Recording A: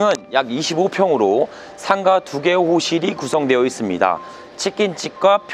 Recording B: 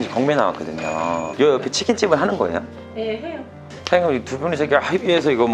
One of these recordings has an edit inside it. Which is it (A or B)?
B